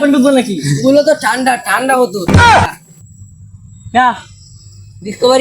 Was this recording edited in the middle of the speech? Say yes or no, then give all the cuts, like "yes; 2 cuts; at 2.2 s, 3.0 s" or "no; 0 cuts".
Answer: yes; 1 cut; at 2.9 s